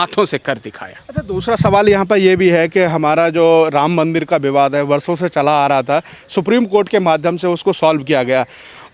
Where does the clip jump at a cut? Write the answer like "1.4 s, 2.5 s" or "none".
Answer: none

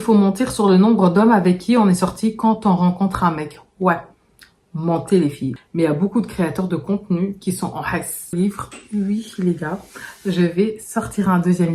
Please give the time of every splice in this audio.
5.6 s, 8.3 s

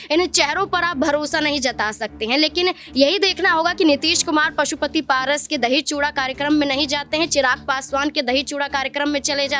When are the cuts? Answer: none

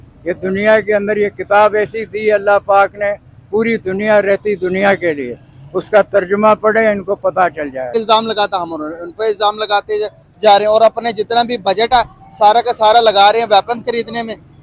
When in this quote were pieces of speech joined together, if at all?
7.9 s

